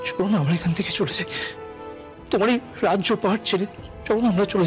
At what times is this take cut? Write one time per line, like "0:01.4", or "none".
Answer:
none